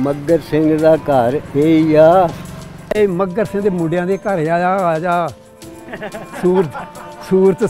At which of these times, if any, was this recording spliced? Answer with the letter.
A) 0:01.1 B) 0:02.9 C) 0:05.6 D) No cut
B